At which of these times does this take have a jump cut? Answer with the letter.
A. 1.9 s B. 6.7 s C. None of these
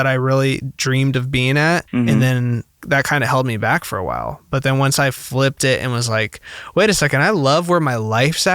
A